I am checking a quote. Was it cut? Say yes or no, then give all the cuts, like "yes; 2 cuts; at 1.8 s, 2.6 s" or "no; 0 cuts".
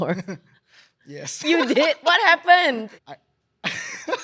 yes; 1 cut; at 2.9 s